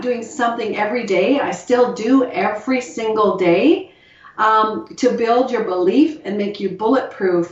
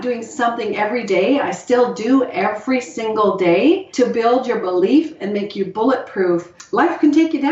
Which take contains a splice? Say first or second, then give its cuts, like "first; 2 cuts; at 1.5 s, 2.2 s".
second; 2 cuts; at 3.9 s, 6.6 s